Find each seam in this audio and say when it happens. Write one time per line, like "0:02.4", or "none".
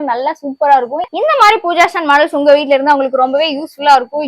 0:01.1